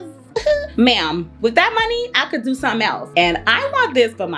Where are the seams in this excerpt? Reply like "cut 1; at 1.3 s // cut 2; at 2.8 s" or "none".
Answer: cut 1; at 3.1 s